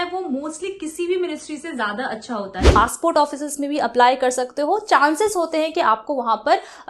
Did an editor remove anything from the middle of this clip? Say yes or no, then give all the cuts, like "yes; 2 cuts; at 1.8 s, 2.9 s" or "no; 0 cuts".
yes; 1 cut; at 2.8 s